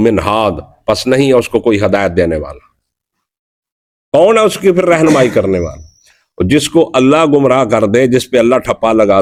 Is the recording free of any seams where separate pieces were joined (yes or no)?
yes